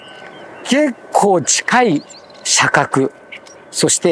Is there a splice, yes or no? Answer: no